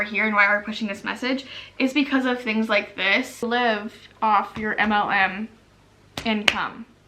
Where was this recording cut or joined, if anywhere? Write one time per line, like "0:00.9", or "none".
0:03.4